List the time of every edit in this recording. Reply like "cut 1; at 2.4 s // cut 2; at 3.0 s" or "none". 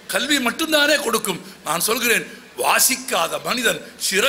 none